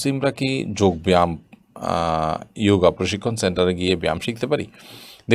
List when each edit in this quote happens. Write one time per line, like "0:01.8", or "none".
none